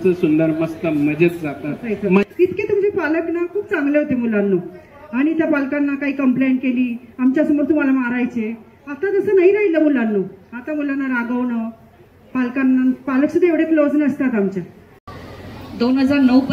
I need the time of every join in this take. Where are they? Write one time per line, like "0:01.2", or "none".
0:02.2
0:14.9